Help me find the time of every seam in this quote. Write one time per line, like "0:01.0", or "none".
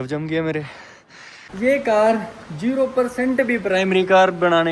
0:01.4